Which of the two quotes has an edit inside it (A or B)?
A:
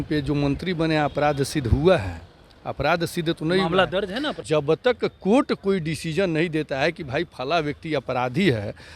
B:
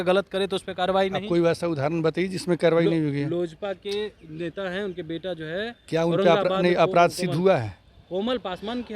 A